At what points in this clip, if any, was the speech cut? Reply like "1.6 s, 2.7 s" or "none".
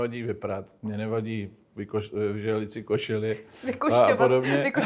none